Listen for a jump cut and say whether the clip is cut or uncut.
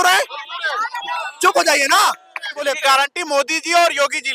uncut